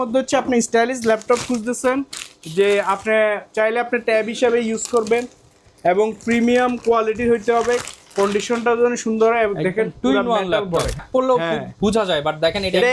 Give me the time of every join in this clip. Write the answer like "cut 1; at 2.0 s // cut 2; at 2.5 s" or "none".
cut 1; at 11.0 s